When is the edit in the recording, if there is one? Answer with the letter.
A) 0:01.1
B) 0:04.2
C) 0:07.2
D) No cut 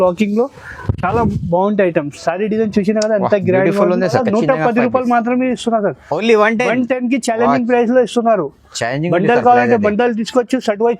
B